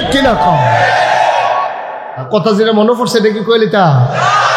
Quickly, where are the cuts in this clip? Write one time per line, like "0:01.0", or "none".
0:02.2

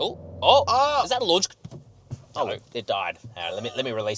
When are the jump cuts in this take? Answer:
none

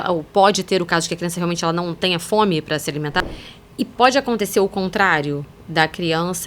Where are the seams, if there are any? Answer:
0:03.1

